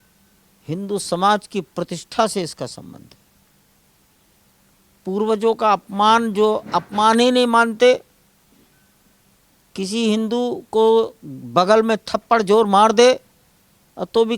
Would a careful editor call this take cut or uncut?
uncut